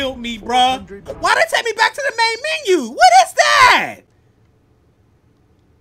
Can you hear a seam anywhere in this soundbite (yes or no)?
yes